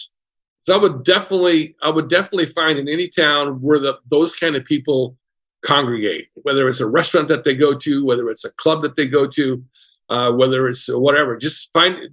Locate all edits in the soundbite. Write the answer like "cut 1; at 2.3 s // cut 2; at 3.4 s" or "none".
none